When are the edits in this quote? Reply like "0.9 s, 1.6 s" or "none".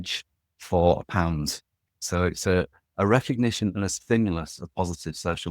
1.9 s